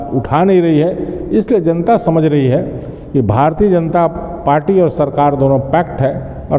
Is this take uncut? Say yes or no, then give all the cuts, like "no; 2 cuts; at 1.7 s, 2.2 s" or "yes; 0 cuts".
yes; 0 cuts